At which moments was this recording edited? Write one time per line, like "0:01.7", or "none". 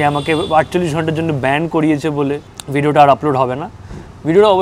0:02.5